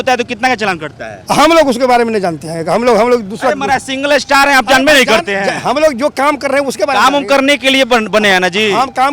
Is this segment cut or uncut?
uncut